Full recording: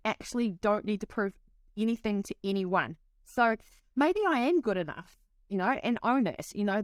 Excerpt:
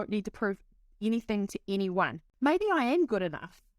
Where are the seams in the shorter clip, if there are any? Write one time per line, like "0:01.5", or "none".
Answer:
0:02.2

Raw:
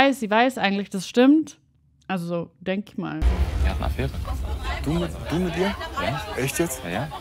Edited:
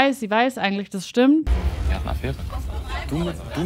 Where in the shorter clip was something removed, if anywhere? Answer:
0:01.5

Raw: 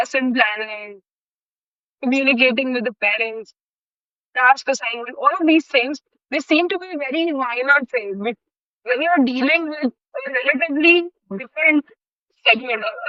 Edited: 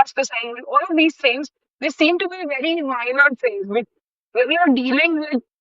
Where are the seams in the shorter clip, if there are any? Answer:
none

